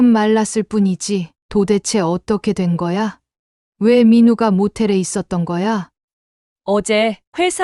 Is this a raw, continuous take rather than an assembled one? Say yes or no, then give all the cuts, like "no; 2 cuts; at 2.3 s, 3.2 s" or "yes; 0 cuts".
no; 2 cuts; at 1.4 s, 5.9 s